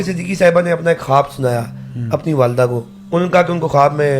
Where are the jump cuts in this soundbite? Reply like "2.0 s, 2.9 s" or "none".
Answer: 2.9 s

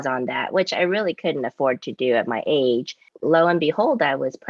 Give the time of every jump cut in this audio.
3.1 s

